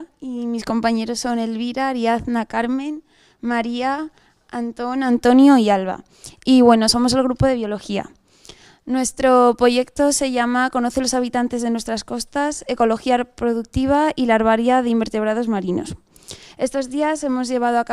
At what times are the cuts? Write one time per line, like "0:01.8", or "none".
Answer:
0:14.2